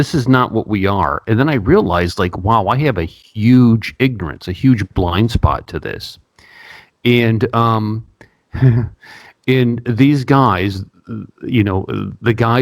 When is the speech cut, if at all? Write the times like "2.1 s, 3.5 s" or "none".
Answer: none